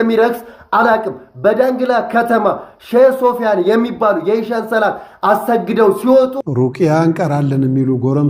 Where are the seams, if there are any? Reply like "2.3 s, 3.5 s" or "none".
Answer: 6.4 s